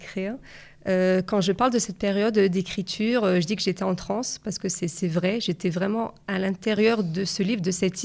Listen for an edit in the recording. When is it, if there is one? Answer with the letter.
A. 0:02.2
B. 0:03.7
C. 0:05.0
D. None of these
D